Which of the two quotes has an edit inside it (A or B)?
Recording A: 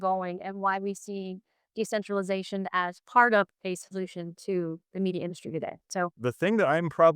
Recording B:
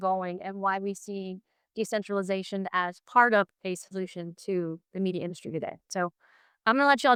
A